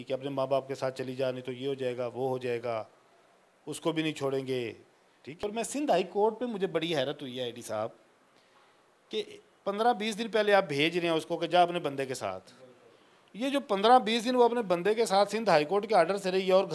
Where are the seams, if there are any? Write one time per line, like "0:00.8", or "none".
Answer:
0:05.4

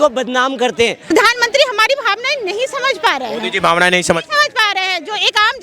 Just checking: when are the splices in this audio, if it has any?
0:01.1

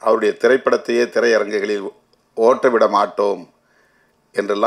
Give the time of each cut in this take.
none

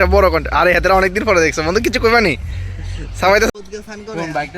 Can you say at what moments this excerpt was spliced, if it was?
0:03.5

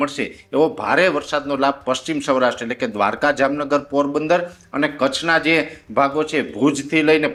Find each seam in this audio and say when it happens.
none

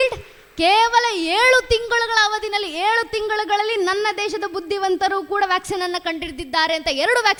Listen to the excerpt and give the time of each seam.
none

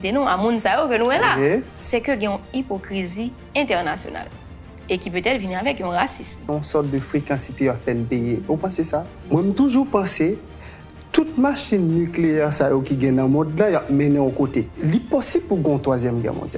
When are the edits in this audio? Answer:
0:01.8
0:06.4
0:09.1
0:14.7

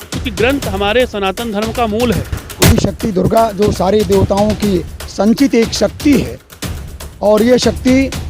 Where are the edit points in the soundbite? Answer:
0:02.7

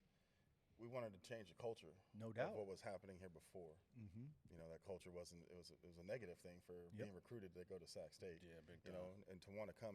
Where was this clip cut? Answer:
0:04.3

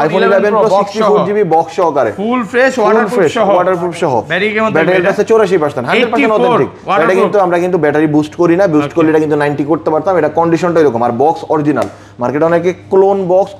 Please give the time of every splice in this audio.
none

